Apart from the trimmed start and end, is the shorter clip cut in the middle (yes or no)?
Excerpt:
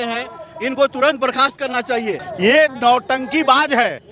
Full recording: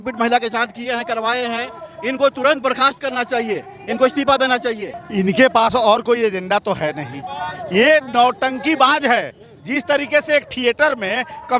yes